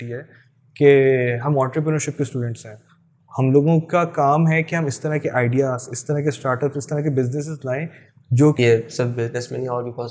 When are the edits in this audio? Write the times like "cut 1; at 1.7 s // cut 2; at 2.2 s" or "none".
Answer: cut 1; at 8.6 s